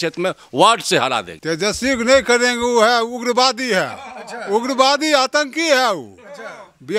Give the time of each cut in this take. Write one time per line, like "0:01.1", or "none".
0:01.3